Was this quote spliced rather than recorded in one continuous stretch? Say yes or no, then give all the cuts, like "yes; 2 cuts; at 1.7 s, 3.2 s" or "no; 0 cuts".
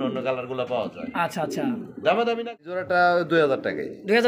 yes; 1 cut; at 2.7 s